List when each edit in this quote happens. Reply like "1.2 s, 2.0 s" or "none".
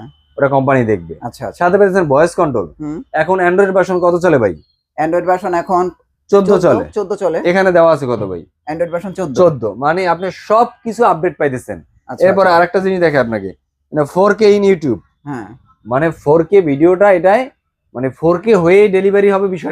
none